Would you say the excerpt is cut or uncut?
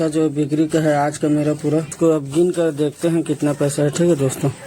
cut